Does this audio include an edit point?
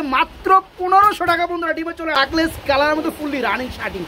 yes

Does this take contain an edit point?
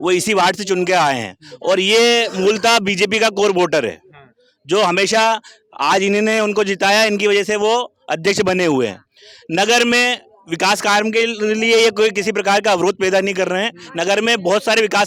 no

